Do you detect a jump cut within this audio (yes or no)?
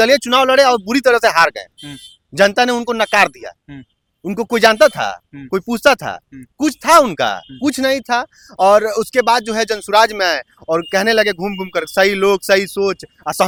no